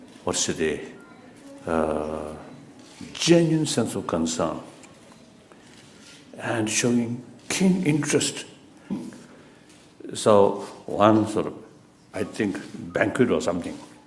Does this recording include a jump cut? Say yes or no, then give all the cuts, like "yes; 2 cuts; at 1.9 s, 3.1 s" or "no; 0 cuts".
no; 0 cuts